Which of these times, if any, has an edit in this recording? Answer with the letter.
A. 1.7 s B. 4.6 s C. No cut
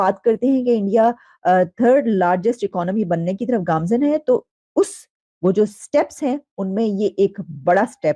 C